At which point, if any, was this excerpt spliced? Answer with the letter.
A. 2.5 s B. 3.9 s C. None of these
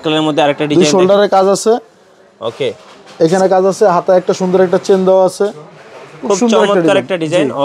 C